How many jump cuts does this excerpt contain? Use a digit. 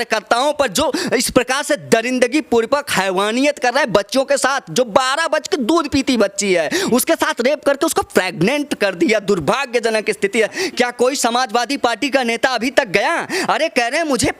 1